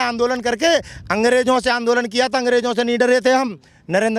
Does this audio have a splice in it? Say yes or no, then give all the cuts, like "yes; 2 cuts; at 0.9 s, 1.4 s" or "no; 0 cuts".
no; 0 cuts